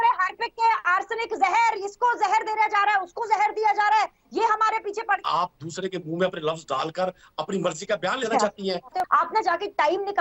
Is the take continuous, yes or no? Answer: no